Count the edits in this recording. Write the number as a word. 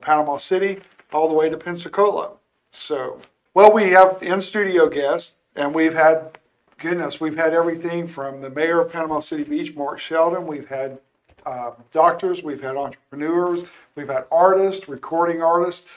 one